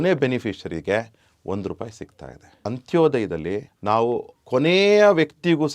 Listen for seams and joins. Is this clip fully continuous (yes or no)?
no